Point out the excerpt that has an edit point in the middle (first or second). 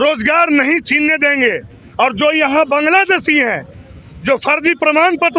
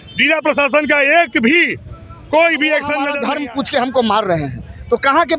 second